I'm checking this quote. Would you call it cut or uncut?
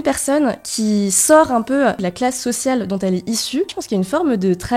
cut